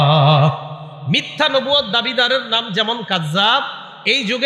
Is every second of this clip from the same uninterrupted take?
yes; 0 cuts

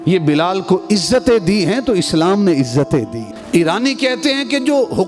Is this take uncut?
no; 1 cut; at 3.3 s

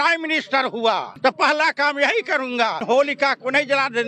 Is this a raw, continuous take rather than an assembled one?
no; 2 cuts; at 1.1 s, 2.8 s

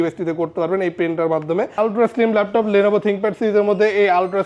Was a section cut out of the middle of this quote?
yes; 1 cut; at 1.8 s

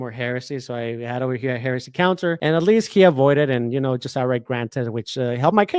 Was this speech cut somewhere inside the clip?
yes; 1 cut; at 2.4 s

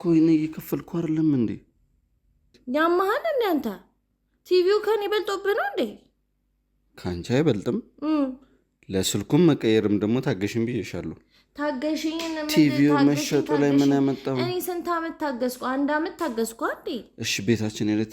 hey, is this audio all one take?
no; 1 cut; at 2.6 s

